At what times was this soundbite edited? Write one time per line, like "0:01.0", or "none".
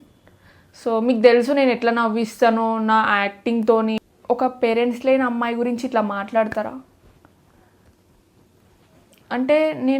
0:04.0